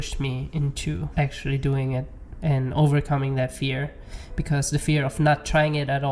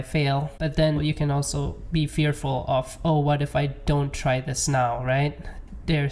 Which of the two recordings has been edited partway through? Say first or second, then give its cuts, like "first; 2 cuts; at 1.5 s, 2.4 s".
second; 1 cut; at 1.0 s